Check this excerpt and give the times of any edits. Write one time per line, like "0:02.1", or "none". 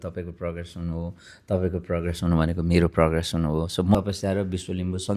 0:03.9